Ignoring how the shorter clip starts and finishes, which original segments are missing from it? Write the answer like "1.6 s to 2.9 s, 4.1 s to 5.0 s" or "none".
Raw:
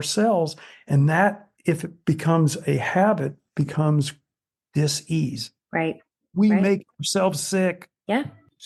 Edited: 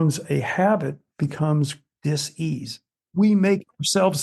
4.2 s to 4.6 s, 5.6 s to 6.1 s